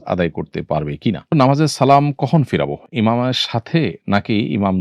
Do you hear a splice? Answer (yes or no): yes